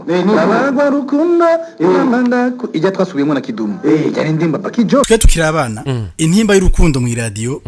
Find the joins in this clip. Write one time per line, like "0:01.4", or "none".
0:05.1